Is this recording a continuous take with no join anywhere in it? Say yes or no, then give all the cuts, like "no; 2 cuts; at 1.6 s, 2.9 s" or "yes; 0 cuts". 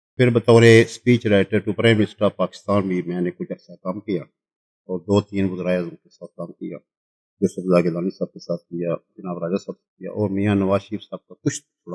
yes; 0 cuts